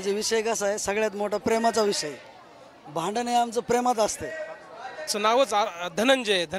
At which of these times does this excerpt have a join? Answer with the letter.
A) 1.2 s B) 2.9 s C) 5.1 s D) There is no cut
C